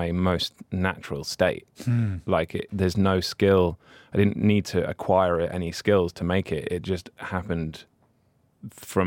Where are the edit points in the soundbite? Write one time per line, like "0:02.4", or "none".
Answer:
0:02.7

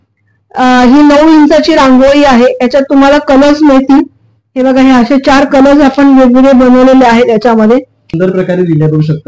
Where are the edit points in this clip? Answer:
0:08.1

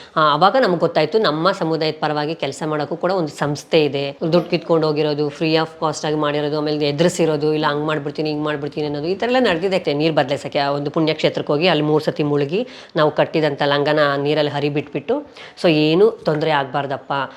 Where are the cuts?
0:04.1
0:09.8

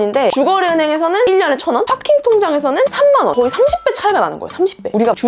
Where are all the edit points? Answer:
none

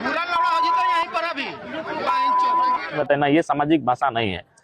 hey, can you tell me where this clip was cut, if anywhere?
0:03.0

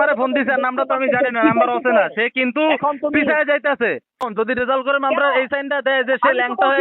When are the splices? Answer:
0:04.3

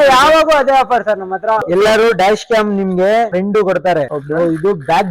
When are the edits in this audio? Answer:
0:01.6
0:03.8

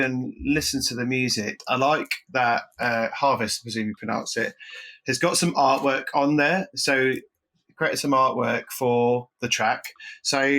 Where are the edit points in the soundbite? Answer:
0:01.6

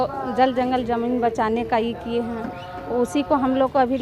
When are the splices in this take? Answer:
none

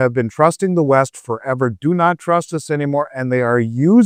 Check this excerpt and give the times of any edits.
none

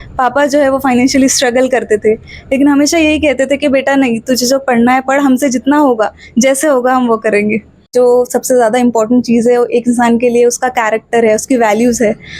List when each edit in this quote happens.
0:07.9

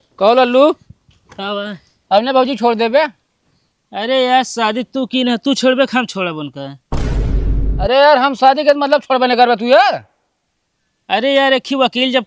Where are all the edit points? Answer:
none

